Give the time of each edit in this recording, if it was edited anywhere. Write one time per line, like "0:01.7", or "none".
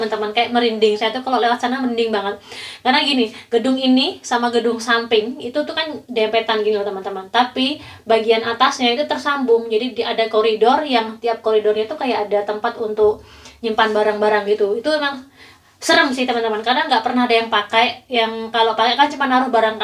none